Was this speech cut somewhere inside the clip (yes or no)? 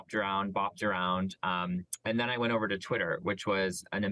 no